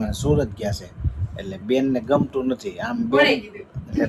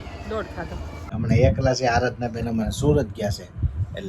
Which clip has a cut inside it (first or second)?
second